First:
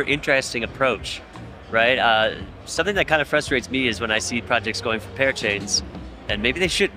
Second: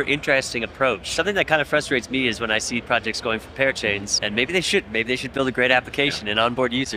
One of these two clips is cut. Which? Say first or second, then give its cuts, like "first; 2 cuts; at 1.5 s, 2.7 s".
second; 2 cuts; at 1.1 s, 4.1 s